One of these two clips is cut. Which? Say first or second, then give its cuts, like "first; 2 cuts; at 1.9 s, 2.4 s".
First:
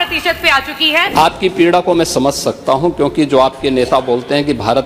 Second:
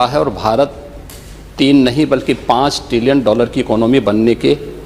first; 1 cut; at 1.1 s